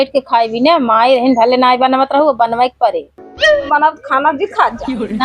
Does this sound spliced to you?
yes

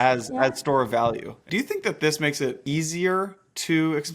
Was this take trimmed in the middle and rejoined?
yes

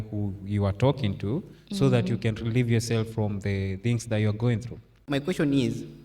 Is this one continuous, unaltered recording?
no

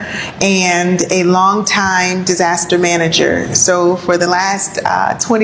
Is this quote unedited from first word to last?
yes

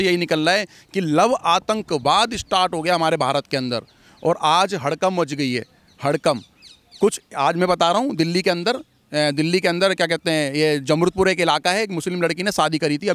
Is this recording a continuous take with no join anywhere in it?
yes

